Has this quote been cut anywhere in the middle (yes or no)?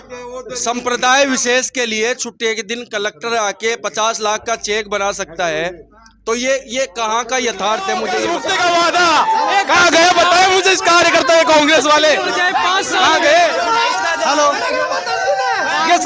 yes